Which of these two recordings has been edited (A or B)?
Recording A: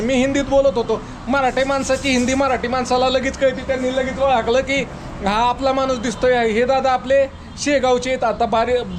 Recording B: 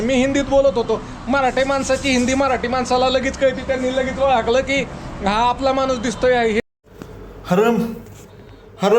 B